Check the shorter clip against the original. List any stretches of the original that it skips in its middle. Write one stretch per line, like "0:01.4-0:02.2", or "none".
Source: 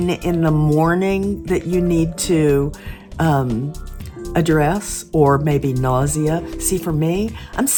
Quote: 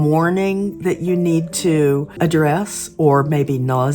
0:02.7-0:04.2